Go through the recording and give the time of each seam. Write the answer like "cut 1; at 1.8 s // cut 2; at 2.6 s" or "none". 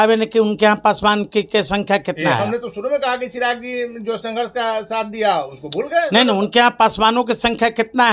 none